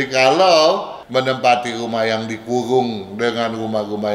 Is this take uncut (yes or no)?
no